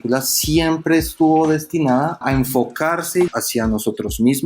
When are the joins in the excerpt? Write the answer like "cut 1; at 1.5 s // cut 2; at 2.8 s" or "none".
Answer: cut 1; at 2.2 s // cut 2; at 3.3 s